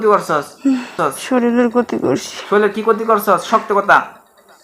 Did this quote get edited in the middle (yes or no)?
yes